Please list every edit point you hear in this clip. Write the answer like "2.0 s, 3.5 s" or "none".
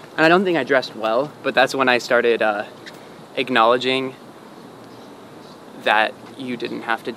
none